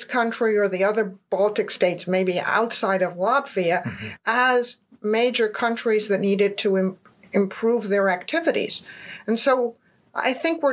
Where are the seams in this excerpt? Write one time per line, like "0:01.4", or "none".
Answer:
0:01.2